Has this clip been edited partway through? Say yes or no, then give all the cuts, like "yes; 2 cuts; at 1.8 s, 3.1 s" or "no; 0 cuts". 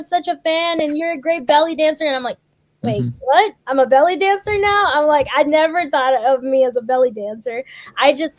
no; 0 cuts